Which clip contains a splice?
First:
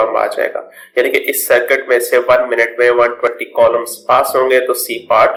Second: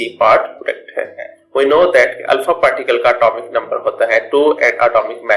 second; 1 cut; at 1.4 s

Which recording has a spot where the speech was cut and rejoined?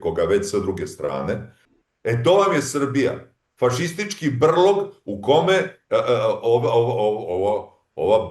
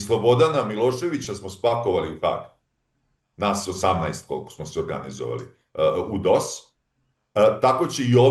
first; 1 cut; at 1.6 s

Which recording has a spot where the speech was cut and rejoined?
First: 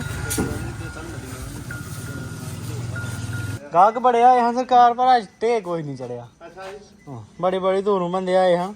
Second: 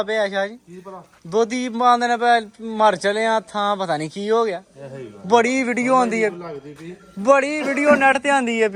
first; 1 cut; at 3.6 s

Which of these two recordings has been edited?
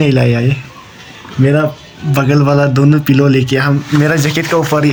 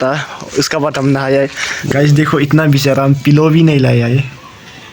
second; 1 cut; at 1.7 s

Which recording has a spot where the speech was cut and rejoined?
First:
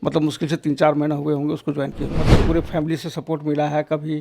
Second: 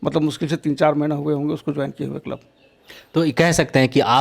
first; 1 cut; at 2.2 s

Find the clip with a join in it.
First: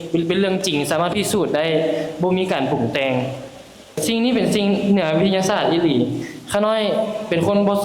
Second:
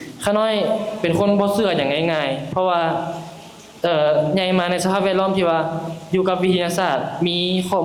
first; 1 cut; at 4.0 s

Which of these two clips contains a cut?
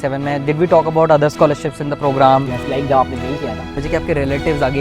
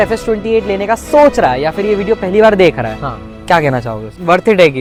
first; 1 cut; at 3.8 s

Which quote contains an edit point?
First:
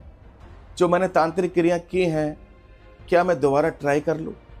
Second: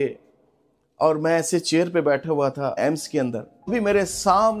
second; 2 cuts; at 2.8 s, 3.7 s

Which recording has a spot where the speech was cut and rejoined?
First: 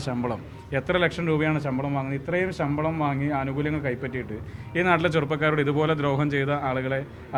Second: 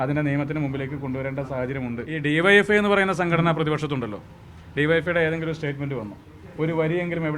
second; 1 cut; at 2.1 s

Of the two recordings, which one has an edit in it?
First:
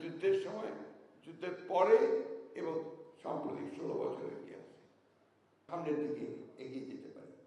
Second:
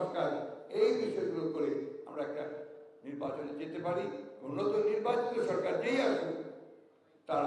first; 1 cut; at 5.7 s

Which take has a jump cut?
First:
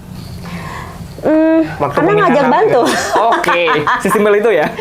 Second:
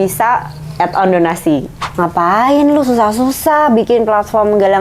second; 1 cut; at 1.8 s

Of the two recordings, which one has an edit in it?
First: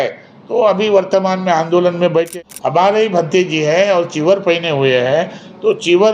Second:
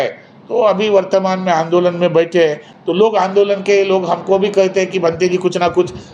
first; 1 cut; at 2.3 s

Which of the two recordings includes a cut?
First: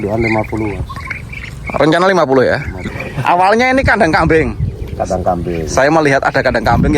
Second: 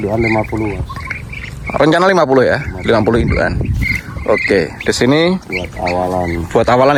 first; 1 cut; at 2.9 s

